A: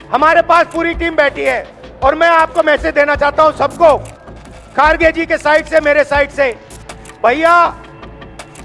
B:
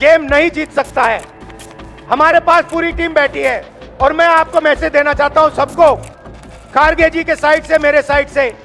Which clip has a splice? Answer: A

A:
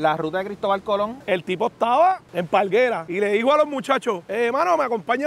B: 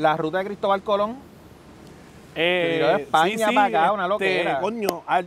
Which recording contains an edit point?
A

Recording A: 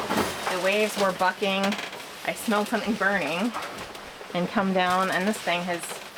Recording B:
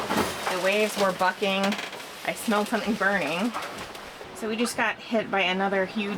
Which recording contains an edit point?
B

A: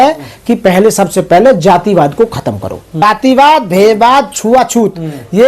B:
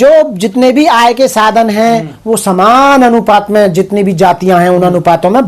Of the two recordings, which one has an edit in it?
A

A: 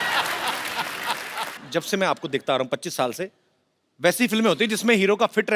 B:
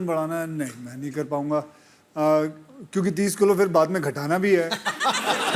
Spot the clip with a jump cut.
A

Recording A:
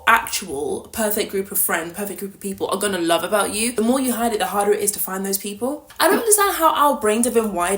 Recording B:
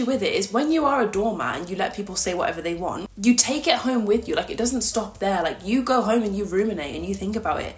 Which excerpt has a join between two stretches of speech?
A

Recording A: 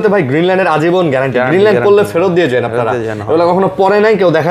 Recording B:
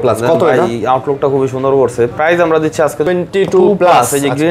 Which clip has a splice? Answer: B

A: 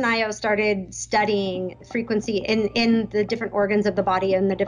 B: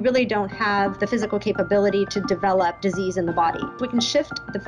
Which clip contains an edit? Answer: B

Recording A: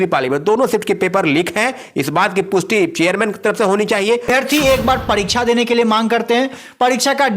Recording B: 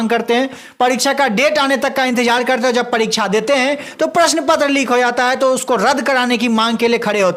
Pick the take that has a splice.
A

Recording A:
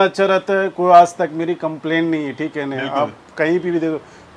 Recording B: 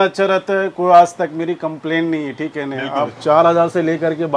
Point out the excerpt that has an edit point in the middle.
B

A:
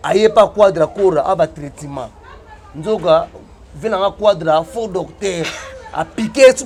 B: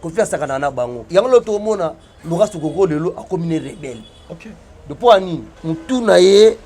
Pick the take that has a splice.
B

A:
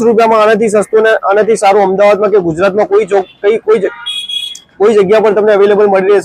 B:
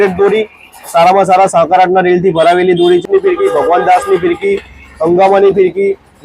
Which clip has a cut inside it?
B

